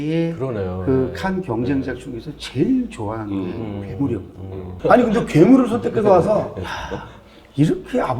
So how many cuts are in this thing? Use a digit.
1